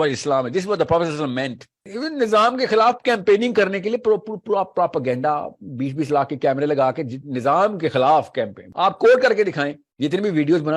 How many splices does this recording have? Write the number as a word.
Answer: three